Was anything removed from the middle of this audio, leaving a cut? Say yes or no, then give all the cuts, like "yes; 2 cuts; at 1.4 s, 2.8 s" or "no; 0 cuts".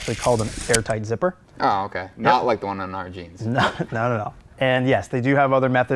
yes; 2 cuts; at 1.5 s, 4.5 s